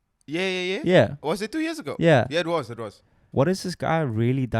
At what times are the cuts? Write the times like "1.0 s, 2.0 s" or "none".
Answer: 3.2 s